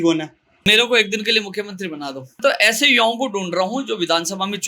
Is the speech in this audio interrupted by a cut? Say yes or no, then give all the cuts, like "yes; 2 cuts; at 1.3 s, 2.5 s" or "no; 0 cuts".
yes; 1 cut; at 2.3 s